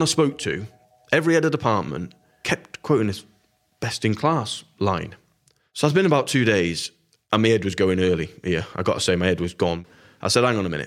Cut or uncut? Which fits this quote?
cut